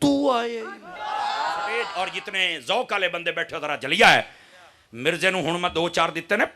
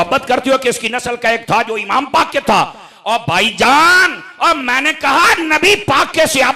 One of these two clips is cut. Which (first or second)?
first